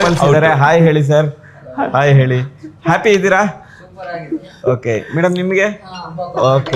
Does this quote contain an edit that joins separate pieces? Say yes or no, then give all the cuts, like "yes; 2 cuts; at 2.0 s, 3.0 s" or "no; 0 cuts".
no; 0 cuts